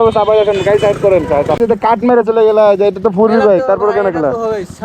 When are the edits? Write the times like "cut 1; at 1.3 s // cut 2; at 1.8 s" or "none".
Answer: cut 1; at 1.6 s